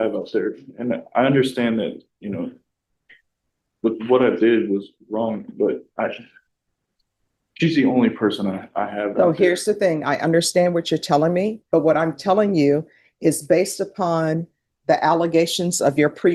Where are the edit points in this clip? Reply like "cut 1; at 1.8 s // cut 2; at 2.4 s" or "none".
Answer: none